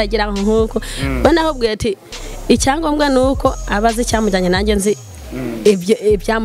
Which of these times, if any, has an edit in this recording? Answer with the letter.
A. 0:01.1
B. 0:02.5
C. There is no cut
C